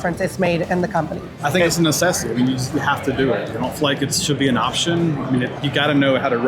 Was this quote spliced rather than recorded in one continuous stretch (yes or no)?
yes